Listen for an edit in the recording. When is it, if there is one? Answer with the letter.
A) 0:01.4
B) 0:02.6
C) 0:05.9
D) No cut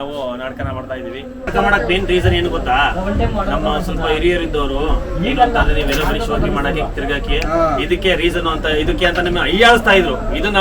A